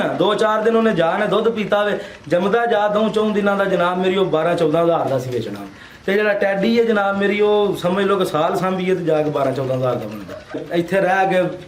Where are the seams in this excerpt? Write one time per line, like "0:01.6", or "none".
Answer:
0:10.6